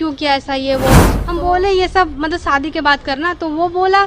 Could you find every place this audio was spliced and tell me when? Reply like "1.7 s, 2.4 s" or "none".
1.2 s